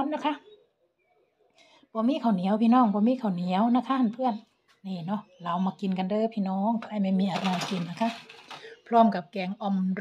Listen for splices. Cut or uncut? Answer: uncut